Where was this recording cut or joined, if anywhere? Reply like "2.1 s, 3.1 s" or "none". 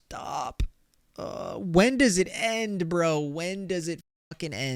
none